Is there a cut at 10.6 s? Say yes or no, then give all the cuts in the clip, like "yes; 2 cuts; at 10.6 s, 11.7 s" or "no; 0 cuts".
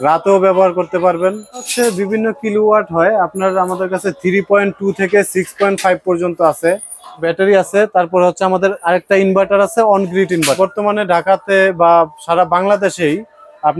yes; 3 cuts; at 1.7 s, 7.2 s, 10.6 s